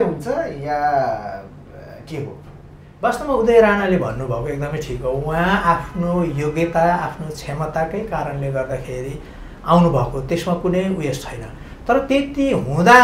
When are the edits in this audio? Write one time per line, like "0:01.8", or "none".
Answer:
0:02.8